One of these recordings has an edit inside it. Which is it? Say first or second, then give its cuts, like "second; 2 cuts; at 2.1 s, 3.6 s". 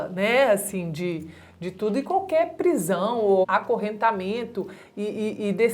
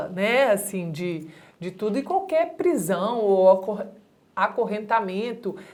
first; 1 cut; at 3.4 s